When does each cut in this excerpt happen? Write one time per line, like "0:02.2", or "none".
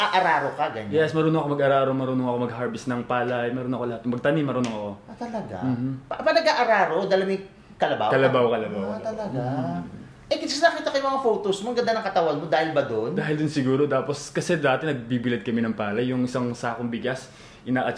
none

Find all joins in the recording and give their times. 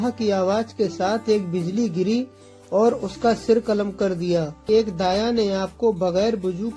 0:04.7

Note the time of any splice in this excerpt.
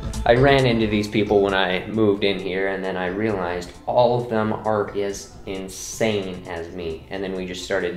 none

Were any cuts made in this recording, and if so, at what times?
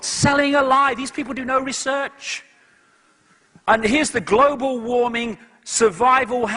none

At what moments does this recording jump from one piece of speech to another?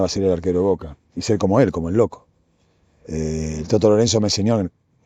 none

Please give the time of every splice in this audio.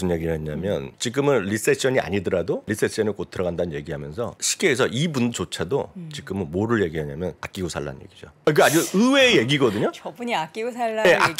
0:01.0
0:02.7
0:04.4
0:07.9

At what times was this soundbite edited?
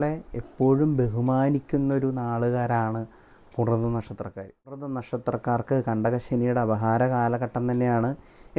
0:04.8

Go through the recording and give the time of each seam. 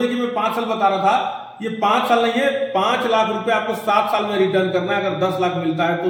none

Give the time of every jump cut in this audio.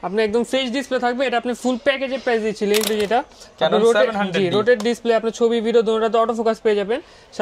0:02.9

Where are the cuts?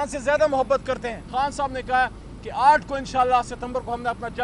0:01.2

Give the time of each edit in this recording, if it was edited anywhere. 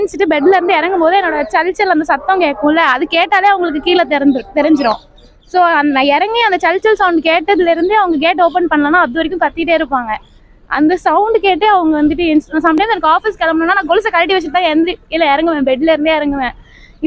none

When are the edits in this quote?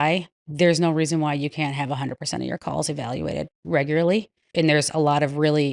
0:04.5

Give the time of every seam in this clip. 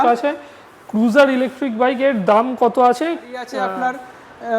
0:03.5

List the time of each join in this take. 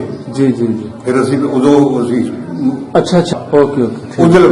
0:03.3

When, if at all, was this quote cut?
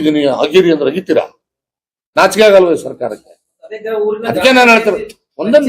none

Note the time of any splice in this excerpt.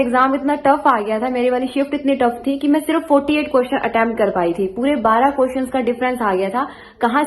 none

